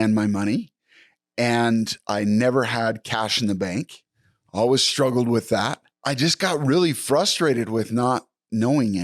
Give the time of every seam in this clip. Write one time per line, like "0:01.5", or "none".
0:05.9